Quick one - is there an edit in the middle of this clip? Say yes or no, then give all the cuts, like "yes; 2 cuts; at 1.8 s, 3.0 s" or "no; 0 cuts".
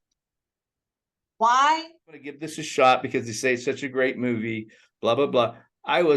yes; 1 cut; at 2.2 s